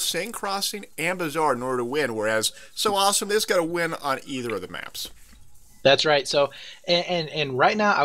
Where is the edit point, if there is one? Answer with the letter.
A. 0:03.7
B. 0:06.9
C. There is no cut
C